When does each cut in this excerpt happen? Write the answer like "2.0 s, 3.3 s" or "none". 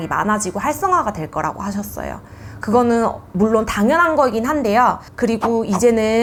none

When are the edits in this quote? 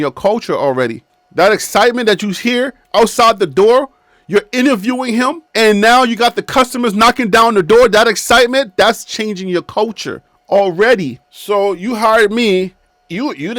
none

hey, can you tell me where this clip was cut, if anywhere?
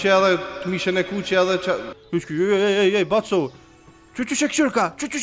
1.9 s

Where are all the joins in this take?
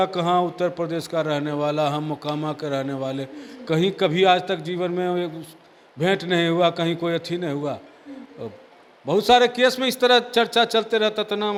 none

